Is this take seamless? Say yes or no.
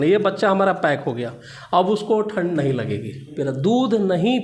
no